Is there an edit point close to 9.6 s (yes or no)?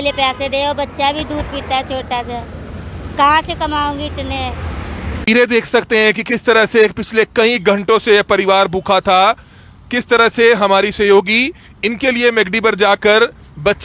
no